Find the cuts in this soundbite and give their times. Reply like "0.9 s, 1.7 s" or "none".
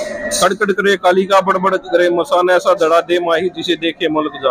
none